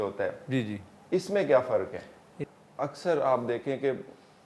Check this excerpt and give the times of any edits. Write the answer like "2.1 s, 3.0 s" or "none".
2.5 s